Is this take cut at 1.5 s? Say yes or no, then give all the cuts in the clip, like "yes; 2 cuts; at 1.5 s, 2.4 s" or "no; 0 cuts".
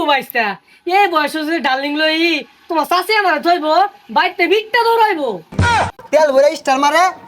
no; 1 cut; at 5.7 s